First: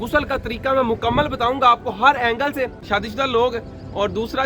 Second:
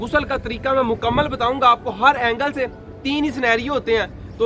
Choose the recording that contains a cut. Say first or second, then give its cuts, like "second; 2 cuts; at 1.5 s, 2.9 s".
first; 1 cut; at 2.8 s